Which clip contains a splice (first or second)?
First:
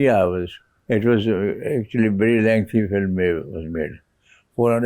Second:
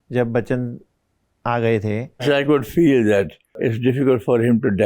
second